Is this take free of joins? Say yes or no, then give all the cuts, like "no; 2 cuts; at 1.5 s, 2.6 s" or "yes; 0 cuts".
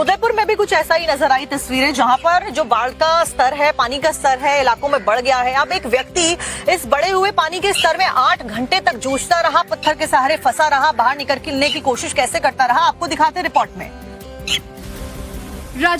no; 1 cut; at 3.3 s